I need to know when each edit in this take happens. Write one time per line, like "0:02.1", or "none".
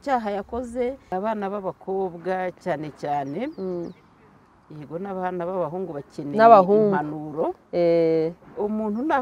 0:01.1